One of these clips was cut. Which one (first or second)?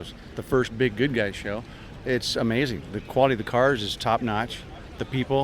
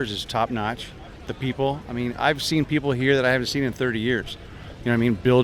first